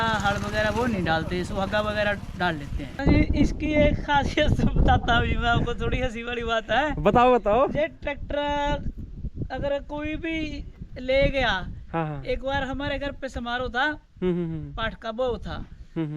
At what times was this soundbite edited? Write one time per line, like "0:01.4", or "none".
0:02.9